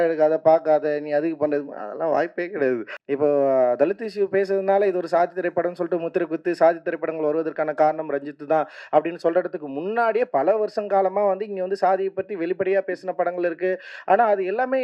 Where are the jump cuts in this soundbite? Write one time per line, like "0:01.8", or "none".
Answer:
0:02.9